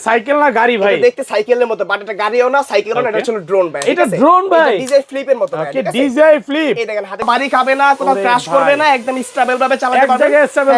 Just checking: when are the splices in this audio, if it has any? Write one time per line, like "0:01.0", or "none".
0:07.2